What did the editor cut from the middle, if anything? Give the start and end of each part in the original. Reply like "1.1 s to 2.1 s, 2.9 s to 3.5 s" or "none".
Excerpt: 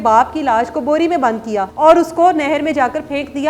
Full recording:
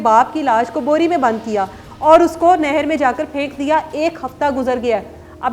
1.7 s to 1.9 s